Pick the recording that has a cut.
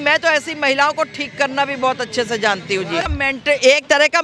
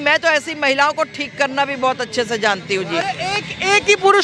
first; 1 cut; at 3.1 s

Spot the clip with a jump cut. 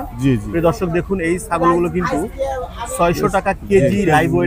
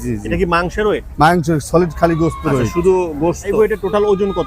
second; 1 cut; at 3.5 s

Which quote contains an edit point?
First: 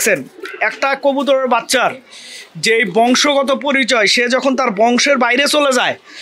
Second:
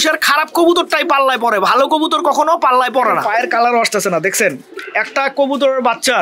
second; 1 cut; at 3.2 s

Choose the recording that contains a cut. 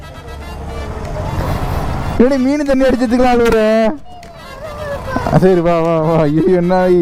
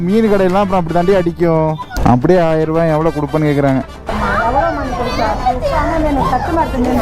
second; 2 cuts; at 1.9 s, 4.1 s

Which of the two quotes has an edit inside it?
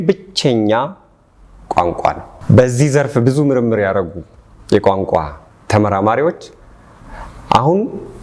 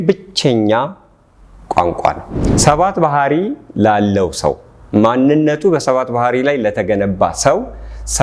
second; 1 cut; at 2.3 s

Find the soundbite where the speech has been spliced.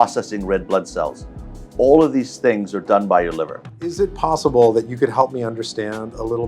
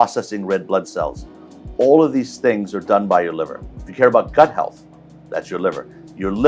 first; 1 cut; at 3.9 s

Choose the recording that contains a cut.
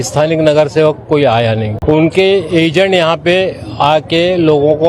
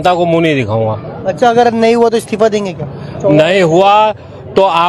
first; 1 cut; at 1.7 s

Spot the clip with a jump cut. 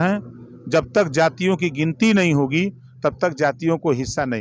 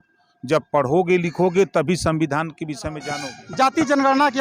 second; 1 cut; at 3.1 s

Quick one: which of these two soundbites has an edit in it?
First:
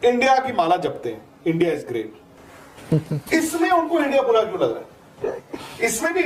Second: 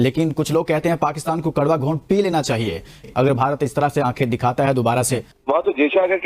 second; 2 cuts; at 3.0 s, 5.3 s

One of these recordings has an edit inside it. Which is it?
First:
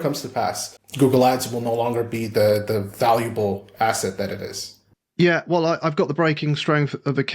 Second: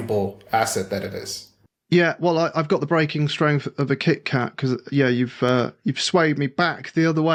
first; 1 cut; at 1.0 s

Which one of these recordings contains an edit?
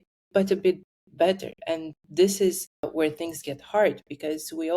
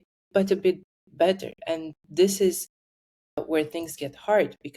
first; 1 cut; at 2.7 s

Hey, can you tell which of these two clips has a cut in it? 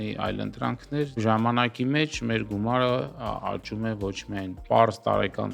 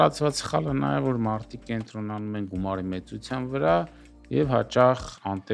first; 2 cuts; at 1.2 s, 4.6 s

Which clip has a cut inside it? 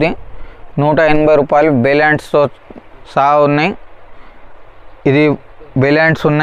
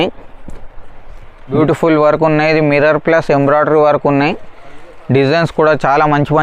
second; 1 cut; at 1.5 s

